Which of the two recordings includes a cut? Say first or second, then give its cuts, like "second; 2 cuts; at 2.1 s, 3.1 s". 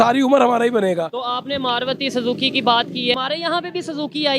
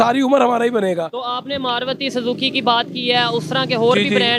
first; 1 cut; at 3.1 s